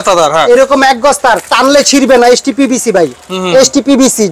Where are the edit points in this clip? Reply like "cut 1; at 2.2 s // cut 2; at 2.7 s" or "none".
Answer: none